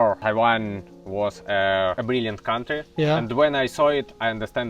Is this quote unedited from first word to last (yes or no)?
yes